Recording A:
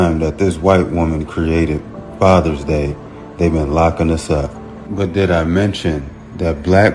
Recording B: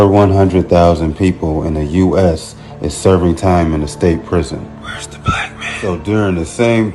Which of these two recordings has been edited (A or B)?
A